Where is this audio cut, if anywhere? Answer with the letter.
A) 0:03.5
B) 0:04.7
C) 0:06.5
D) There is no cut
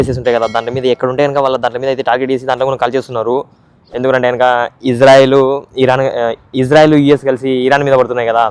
D